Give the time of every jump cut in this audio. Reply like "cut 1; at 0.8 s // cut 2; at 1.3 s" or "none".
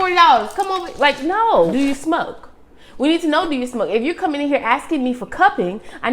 cut 1; at 1.7 s